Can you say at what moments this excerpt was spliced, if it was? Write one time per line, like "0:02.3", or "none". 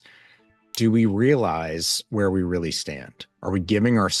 none

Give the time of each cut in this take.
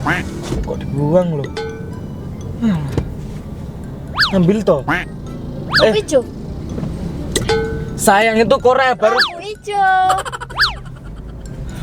0:01.5

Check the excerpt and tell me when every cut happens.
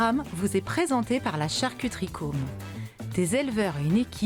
none

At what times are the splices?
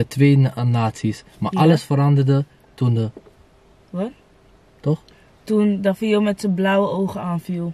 none

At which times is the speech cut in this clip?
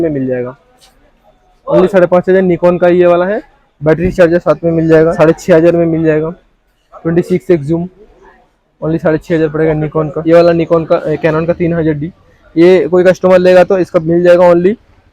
0:05.1
0:10.2

